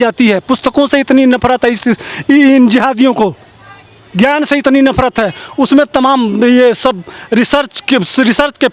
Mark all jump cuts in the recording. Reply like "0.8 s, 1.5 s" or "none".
none